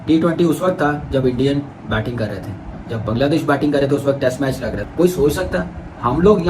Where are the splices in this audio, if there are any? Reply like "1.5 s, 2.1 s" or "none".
4.8 s